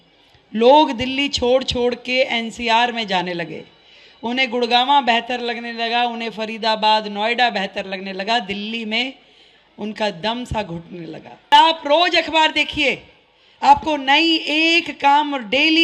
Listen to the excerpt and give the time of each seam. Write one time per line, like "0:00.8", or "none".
0:11.5